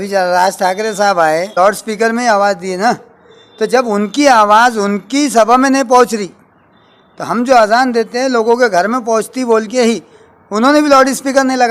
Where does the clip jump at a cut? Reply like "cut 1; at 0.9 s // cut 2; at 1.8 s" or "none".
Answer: cut 1; at 1.5 s